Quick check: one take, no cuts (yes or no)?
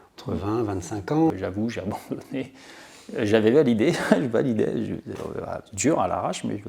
no